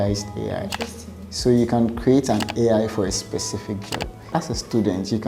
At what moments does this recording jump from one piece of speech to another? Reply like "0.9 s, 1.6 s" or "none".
4.3 s